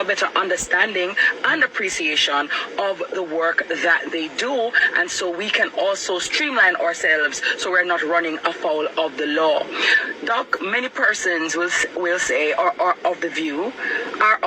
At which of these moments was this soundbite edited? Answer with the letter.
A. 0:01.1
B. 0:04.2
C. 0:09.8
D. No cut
D